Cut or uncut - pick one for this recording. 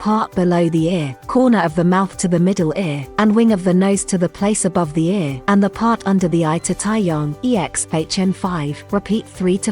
cut